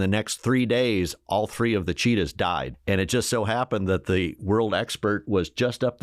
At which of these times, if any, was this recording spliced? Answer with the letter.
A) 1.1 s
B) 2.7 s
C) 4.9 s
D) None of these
B